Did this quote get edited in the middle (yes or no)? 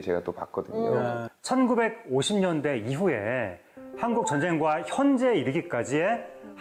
no